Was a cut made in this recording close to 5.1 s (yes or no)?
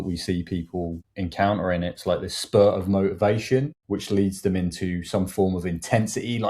no